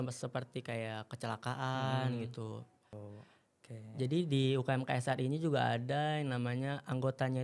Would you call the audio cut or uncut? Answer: cut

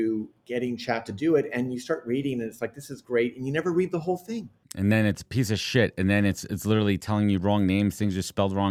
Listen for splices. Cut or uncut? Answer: uncut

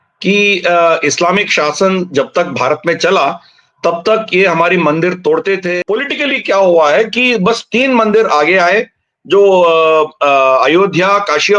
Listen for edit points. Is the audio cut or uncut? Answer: cut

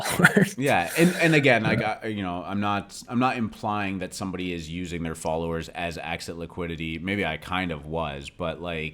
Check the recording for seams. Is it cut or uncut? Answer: uncut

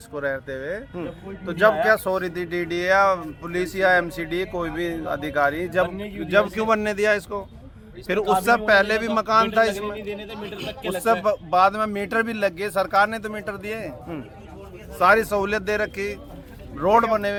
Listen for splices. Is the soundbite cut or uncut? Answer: uncut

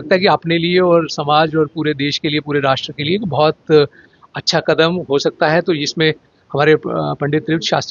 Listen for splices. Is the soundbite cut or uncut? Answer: uncut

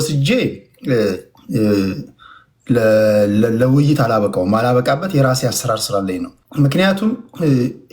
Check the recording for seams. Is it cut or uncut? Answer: cut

